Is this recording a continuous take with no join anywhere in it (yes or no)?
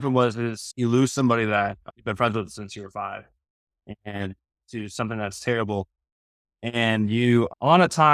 yes